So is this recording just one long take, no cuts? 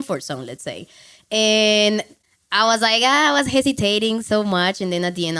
no; 1 cut; at 2.1 s

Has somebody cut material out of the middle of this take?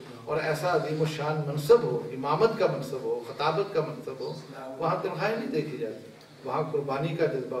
no; 0 cuts

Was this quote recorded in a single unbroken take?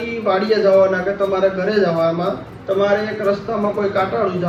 yes; 0 cuts

